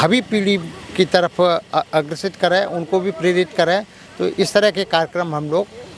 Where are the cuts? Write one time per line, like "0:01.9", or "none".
none